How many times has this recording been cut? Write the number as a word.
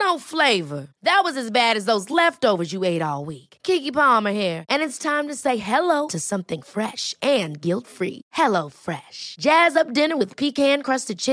zero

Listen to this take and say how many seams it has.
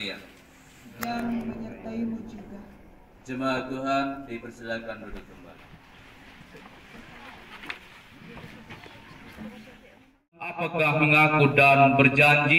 one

